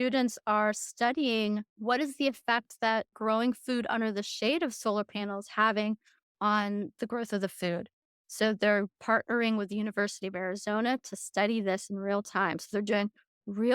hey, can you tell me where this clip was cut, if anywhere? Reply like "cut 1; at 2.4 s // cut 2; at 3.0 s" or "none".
cut 1; at 1.7 s // cut 2; at 3.2 s